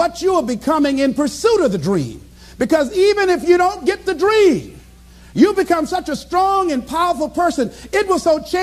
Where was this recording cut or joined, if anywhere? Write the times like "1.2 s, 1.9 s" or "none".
4.4 s